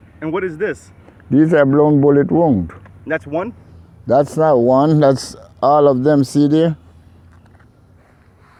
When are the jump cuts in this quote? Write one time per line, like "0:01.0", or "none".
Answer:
none